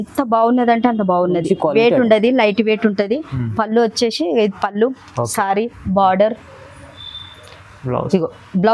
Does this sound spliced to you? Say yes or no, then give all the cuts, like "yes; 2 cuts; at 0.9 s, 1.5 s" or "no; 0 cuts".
no; 0 cuts